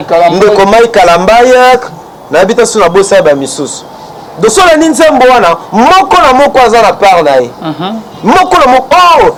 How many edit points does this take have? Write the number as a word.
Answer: zero